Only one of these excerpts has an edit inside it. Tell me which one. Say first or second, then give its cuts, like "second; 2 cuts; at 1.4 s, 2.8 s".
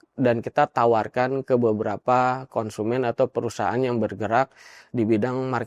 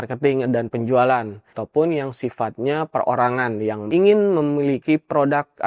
second; 2 cuts; at 1.6 s, 3.8 s